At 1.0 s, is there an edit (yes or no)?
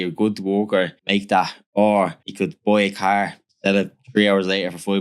yes